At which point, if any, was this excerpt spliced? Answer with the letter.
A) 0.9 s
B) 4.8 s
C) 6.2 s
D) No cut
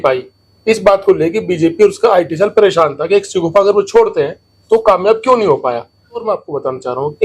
C